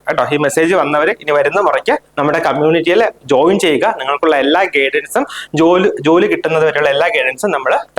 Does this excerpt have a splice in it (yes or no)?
no